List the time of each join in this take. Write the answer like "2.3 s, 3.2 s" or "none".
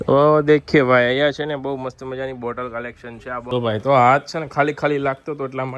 3.4 s